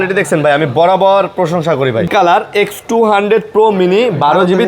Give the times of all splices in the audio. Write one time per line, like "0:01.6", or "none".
0:02.1